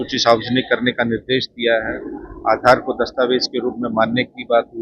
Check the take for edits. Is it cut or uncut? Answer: uncut